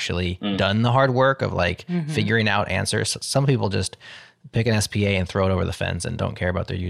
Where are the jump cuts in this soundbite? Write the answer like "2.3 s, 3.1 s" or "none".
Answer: none